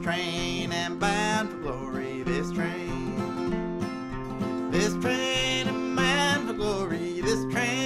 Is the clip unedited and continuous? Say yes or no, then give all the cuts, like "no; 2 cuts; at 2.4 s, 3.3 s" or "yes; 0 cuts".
yes; 0 cuts